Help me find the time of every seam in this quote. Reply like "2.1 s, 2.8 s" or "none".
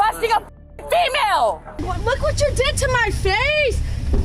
1.8 s